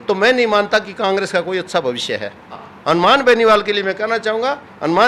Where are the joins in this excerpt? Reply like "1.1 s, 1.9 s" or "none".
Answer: 2.7 s